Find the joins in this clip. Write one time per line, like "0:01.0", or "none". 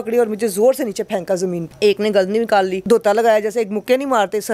0:01.6
0:02.8